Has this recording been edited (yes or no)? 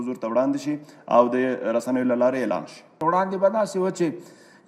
yes